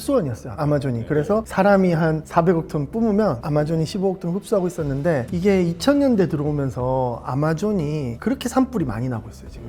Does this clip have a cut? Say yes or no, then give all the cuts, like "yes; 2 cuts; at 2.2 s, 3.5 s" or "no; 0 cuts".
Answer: no; 0 cuts